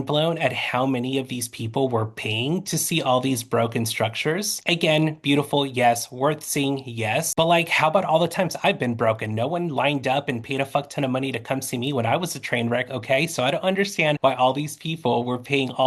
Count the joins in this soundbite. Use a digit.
0